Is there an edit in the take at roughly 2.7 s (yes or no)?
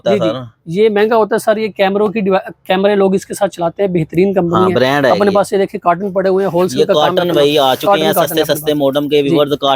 no